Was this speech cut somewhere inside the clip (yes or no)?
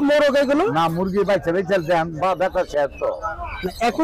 no